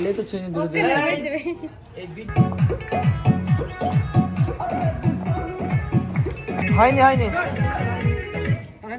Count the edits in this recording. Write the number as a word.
two